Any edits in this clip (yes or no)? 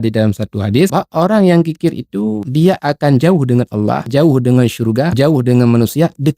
yes